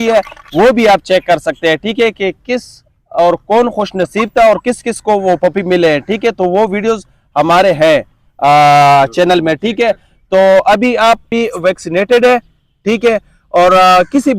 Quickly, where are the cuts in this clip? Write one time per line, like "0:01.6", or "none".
0:11.3